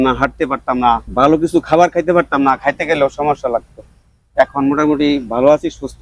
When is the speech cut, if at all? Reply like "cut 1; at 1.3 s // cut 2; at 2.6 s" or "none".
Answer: cut 1; at 1.1 s

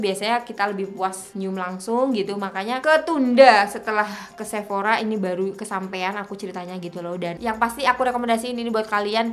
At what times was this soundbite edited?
cut 1; at 1.2 s // cut 2; at 2.8 s // cut 3; at 7.3 s

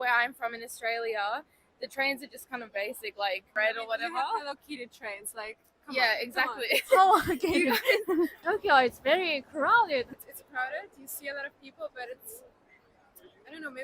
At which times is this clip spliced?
cut 1; at 3.5 s // cut 2; at 8.4 s // cut 3; at 10.1 s

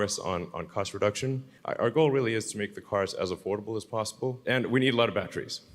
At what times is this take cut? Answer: cut 1; at 1.5 s // cut 2; at 4.4 s

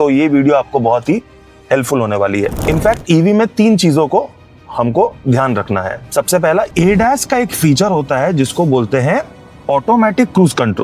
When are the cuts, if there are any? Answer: cut 1; at 2.6 s // cut 2; at 6.7 s

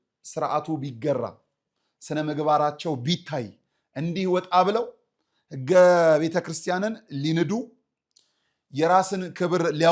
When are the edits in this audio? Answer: none

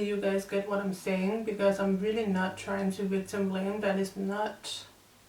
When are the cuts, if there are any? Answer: none

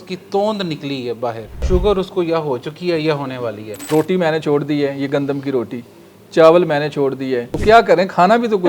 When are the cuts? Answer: cut 1; at 1.5 s // cut 2; at 3.7 s // cut 3; at 7.5 s

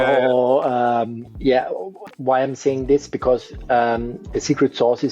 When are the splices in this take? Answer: cut 1; at 1.2 s // cut 2; at 2.2 s

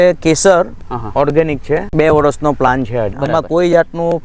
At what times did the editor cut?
cut 1; at 1.9 s // cut 2; at 3.1 s

